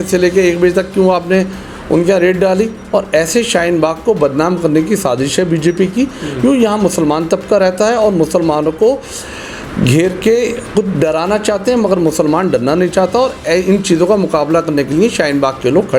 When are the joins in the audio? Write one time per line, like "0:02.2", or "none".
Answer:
none